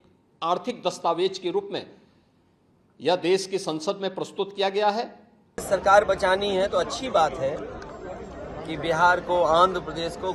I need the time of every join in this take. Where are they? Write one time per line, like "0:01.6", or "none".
0:05.6